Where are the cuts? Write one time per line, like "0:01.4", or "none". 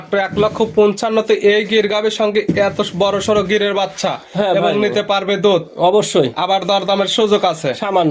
none